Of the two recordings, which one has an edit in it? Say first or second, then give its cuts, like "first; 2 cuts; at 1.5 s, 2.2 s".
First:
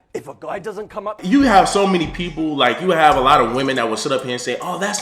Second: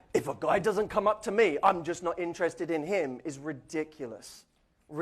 second; 1 cut; at 1.1 s